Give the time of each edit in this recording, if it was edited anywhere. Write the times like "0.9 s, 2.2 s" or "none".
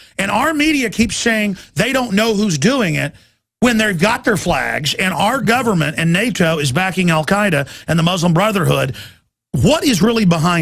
5.4 s